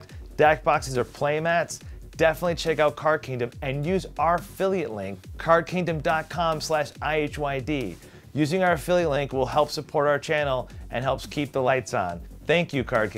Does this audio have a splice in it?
yes; 1 cut; at 12.3 s

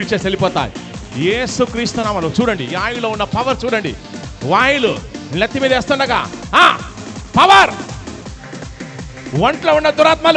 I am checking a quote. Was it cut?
no; 0 cuts

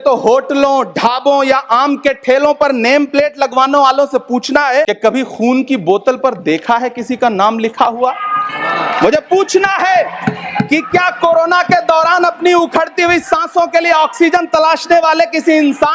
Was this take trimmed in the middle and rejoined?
yes; 1 cut; at 4.9 s

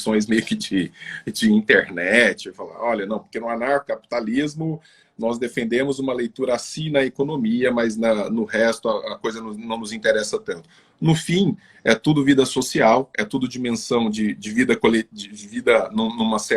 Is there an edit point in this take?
no; 0 cuts

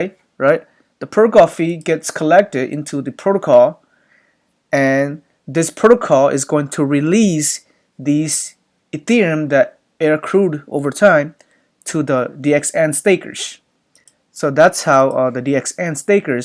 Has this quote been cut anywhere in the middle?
no; 0 cuts

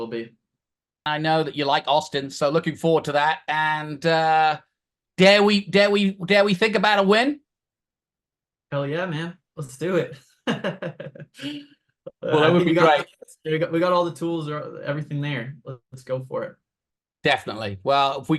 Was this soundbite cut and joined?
yes; 1 cut; at 1.0 s

